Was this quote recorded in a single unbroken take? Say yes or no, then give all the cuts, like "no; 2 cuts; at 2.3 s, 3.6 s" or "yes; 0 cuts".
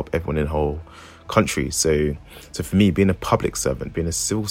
yes; 0 cuts